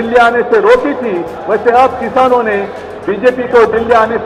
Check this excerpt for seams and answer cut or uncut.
uncut